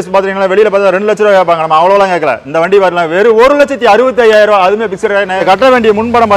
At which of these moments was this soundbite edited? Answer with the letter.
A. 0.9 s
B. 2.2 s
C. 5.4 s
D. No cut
C